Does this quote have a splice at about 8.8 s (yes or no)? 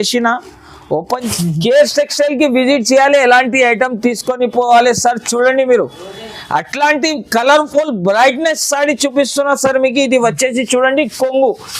no